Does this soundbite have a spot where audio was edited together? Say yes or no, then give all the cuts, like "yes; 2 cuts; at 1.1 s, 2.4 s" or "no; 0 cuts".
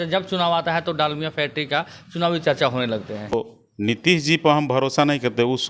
yes; 1 cut; at 3.3 s